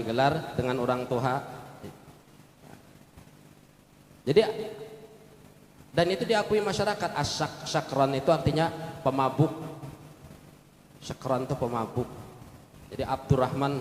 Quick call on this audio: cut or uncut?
uncut